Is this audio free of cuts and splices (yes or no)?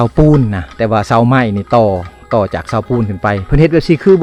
yes